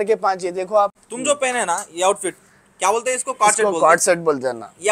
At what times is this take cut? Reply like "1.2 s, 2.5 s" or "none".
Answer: 1.1 s